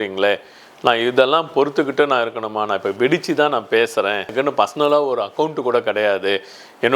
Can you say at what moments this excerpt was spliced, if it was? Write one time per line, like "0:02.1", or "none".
0:04.3